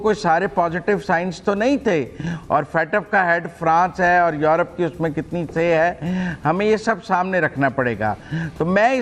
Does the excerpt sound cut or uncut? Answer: uncut